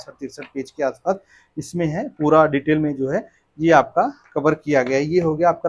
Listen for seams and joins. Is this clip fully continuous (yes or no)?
yes